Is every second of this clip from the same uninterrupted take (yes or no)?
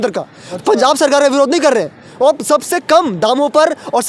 yes